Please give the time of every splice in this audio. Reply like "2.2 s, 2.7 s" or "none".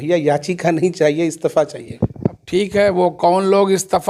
none